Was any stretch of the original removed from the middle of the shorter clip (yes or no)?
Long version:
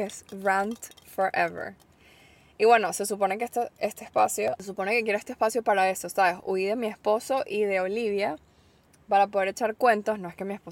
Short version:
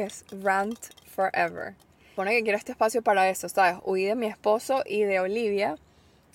yes